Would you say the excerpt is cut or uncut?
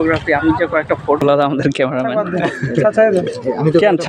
cut